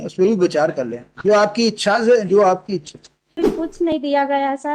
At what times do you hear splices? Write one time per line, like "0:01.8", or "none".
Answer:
0:03.6